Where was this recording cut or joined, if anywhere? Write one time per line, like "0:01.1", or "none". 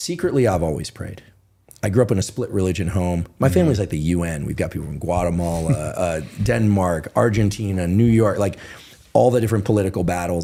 none